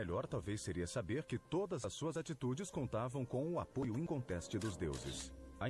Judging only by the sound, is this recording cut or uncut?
cut